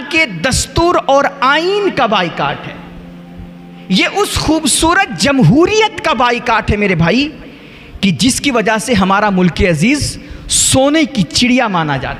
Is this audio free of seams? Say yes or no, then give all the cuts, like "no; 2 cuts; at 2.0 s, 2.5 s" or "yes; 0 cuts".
yes; 0 cuts